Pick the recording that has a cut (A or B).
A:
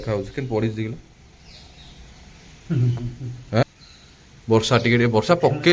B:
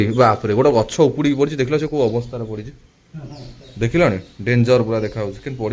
A